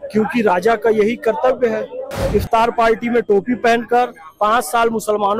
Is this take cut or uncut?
cut